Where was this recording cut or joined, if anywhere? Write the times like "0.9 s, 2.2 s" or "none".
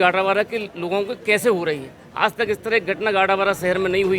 none

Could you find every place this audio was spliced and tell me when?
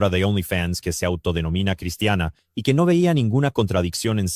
none

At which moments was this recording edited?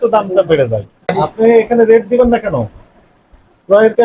1.0 s

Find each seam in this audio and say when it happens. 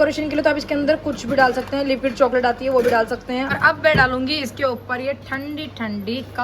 3.5 s

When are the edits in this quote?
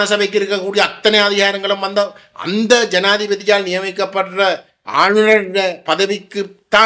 none

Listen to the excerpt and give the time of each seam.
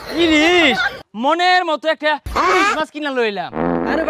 1.0 s

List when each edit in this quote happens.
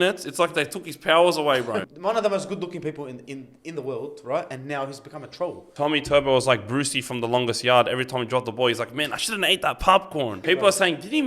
1.9 s, 5.6 s, 10.4 s

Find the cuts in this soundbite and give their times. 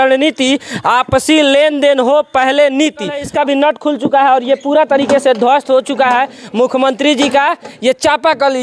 3.2 s

